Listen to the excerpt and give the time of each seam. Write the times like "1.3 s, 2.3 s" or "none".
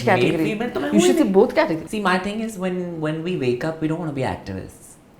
1.8 s